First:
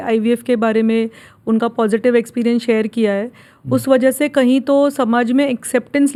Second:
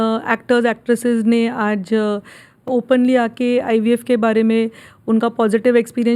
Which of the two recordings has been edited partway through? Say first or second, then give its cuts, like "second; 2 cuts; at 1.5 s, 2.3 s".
second; 1 cut; at 2.7 s